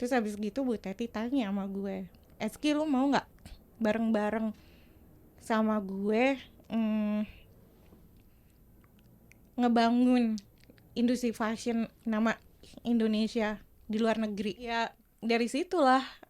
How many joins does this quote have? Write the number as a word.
one